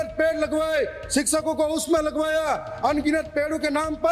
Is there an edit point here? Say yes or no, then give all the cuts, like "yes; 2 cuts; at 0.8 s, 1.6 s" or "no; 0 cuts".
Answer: no; 0 cuts